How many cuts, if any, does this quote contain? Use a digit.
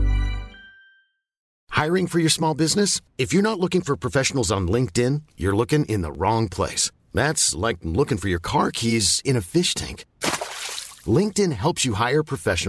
1